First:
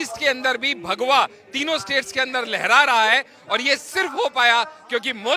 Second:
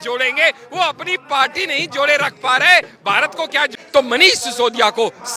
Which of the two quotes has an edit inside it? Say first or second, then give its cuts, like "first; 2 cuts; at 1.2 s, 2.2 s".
second; 1 cut; at 3.7 s